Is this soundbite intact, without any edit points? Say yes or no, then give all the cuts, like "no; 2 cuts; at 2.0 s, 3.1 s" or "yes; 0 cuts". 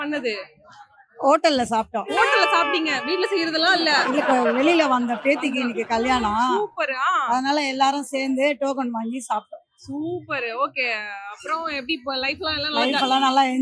yes; 0 cuts